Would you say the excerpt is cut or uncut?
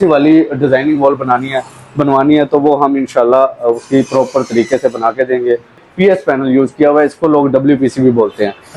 cut